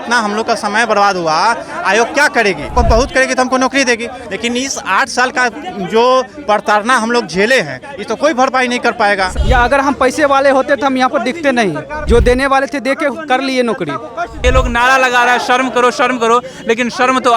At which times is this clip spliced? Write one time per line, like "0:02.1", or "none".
0:02.7
0:09.4
0:11.9
0:14.4